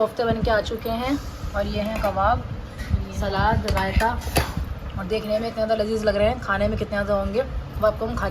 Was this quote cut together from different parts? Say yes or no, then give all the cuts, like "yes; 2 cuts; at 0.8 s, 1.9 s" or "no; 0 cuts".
no; 0 cuts